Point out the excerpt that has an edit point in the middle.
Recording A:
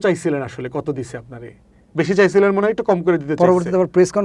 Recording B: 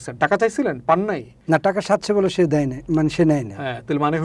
B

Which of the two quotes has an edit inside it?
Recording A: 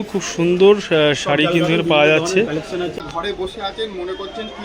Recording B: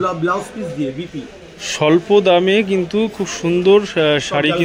A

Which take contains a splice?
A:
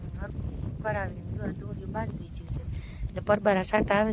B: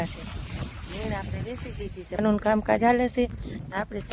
B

